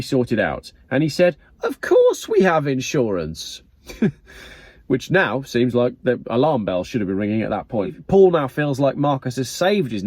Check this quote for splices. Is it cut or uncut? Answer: cut